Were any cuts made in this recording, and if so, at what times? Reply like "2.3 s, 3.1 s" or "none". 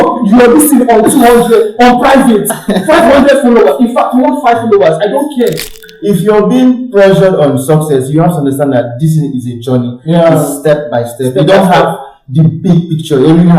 5.8 s